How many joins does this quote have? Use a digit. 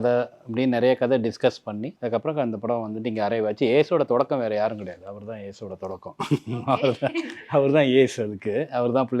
1